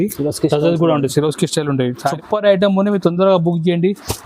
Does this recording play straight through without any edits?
no; 1 cut; at 2.2 s

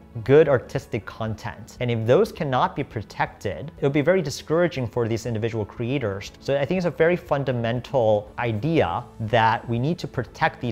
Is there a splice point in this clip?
yes; 3 cuts; at 3.7 s, 6.3 s, 9.1 s

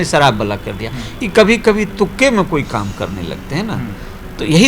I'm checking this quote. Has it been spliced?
no; 0 cuts

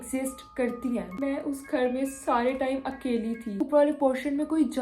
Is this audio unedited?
no; 2 cuts; at 1.1 s, 3.6 s

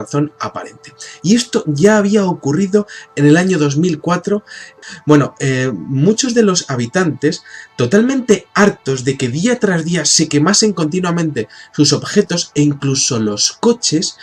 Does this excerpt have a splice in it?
no; 0 cuts

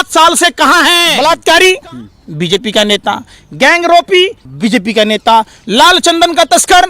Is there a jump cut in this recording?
yes; 2 cuts; at 1.1 s, 4.4 s

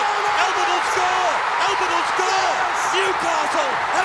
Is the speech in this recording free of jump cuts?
yes; 0 cuts

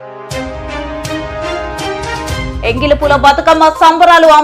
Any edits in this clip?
yes; 1 cut; at 2.4 s

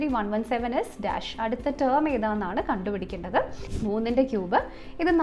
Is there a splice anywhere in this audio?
yes; 1 cut; at 3.6 s

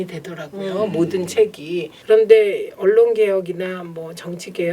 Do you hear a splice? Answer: yes; 1 cut; at 1.9 s

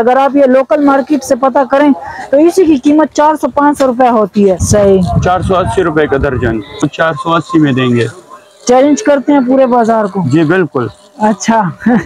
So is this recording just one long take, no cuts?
no; 2 cuts; at 4.6 s, 6.8 s

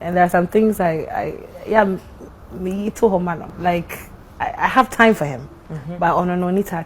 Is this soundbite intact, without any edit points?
no; 1 cut; at 3.5 s

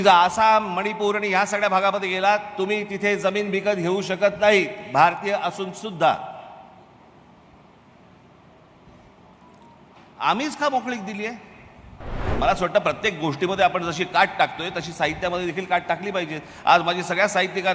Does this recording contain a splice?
yes; 1 cut; at 12.3 s

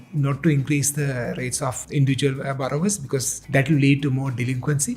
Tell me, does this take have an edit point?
yes; 2 cuts; at 1.8 s, 3.4 s

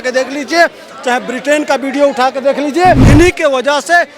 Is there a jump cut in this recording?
yes; 1 cut; at 3.0 s

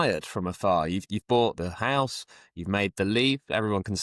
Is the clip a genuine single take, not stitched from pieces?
yes; 0 cuts

